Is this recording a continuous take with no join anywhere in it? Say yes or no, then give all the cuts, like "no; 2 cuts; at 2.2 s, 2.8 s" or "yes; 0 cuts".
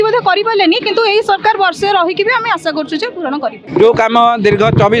no; 1 cut; at 3.6 s